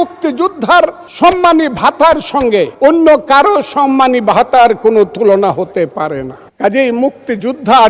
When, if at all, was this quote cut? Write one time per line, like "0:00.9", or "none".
0:01.0
0:02.7
0:06.4